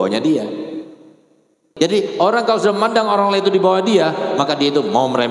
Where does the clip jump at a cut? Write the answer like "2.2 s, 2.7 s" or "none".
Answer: 1.6 s